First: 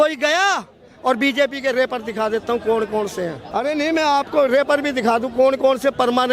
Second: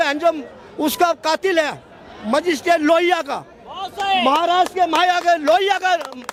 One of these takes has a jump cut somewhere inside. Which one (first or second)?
first